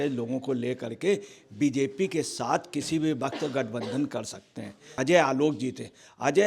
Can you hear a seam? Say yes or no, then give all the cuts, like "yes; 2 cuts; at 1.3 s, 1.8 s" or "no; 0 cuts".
yes; 1 cut; at 4.9 s